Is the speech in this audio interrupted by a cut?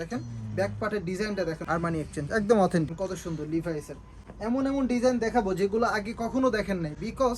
no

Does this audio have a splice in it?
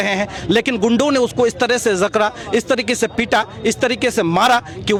no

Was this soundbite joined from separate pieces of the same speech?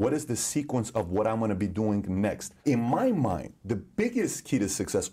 yes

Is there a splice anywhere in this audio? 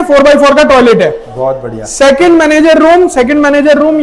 no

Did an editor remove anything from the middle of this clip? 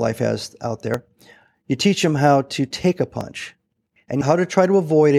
yes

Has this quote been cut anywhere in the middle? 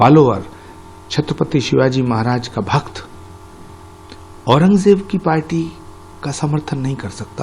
no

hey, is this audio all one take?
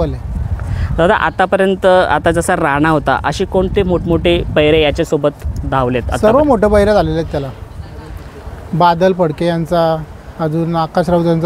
yes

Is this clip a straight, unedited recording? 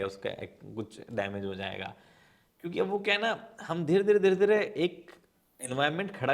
yes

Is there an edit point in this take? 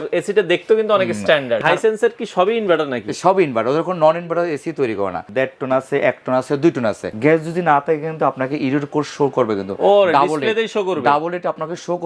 yes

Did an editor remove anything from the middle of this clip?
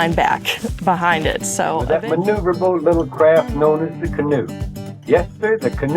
yes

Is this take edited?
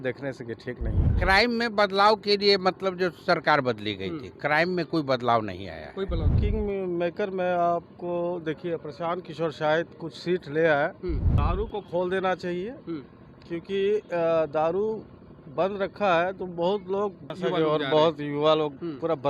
yes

